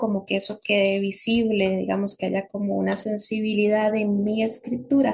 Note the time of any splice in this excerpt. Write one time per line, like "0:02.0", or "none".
none